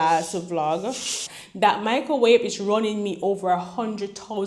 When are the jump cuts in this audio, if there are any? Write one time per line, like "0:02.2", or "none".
0:01.2

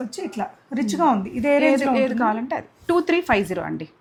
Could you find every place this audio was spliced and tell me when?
none

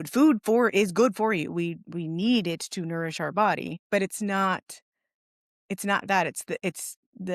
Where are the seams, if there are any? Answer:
0:03.7

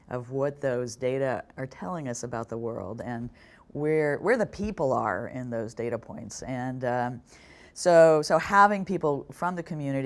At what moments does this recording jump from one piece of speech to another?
none

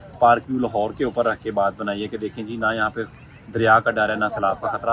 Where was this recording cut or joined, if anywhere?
none

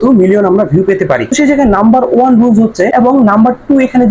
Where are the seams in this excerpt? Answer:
0:01.3
0:02.9

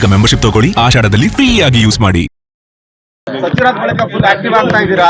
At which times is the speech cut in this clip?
0:03.1

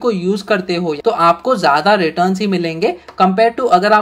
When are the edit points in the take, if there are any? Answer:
0:01.0

